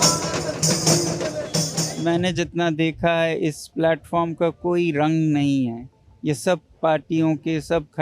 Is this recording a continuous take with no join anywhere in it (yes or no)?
no